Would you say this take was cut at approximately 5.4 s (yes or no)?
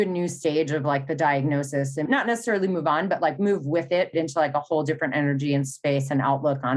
no